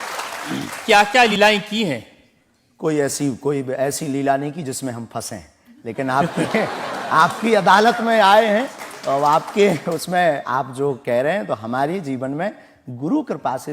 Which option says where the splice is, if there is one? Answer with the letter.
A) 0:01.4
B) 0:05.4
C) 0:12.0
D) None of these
A